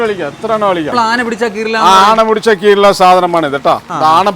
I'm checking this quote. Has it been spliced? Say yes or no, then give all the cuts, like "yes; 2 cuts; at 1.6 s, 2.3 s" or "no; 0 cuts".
yes; 1 cut; at 0.9 s